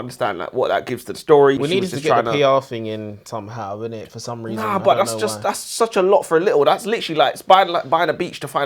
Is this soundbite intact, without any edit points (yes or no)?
no